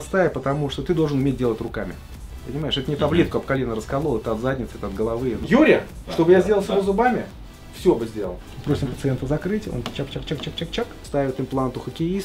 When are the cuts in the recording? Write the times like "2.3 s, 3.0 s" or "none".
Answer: 5.4 s, 8.3 s, 11.0 s